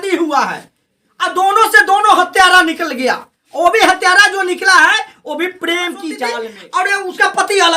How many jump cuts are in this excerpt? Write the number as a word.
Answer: one